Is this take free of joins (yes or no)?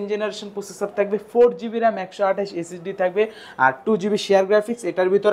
yes